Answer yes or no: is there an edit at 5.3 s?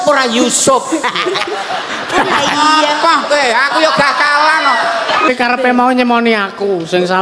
yes